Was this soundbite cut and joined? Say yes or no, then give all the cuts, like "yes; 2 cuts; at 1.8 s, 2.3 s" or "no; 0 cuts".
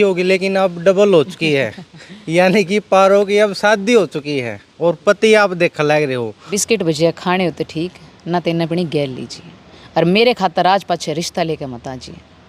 yes; 1 cut; at 6.6 s